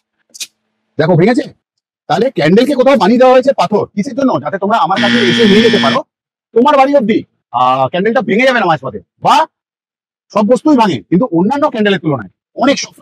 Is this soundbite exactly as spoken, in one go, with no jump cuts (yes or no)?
yes